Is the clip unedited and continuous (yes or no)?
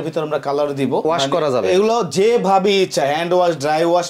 no